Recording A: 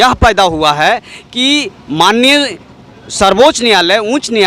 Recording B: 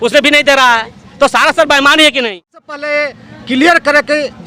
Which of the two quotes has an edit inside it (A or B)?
B